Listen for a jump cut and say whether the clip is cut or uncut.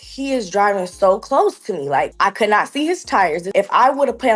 cut